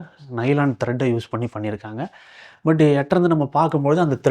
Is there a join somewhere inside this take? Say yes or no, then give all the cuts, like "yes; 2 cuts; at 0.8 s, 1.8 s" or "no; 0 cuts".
no; 0 cuts